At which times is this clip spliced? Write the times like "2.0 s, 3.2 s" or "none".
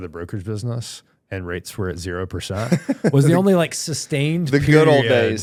none